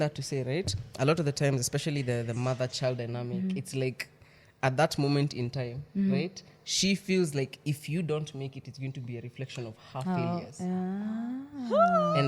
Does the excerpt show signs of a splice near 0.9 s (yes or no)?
no